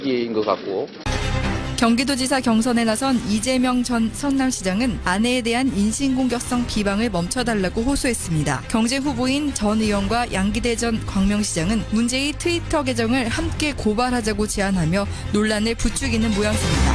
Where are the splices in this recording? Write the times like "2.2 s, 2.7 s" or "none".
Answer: 0.9 s

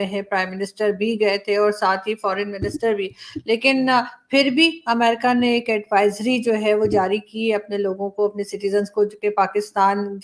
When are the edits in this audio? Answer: none

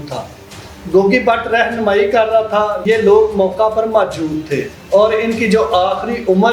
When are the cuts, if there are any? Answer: 2.8 s, 4.8 s

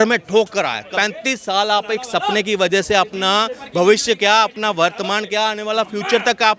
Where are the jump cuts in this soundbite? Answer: 0.9 s

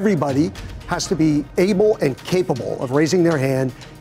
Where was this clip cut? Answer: none

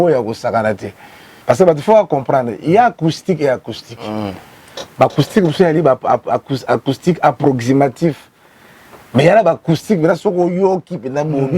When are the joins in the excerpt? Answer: 1.3 s

